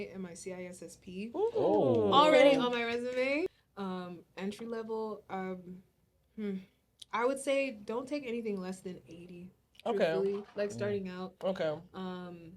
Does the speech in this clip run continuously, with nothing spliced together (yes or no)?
no